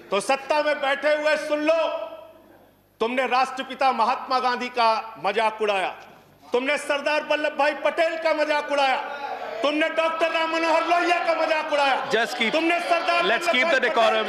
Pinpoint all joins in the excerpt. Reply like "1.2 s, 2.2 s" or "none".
none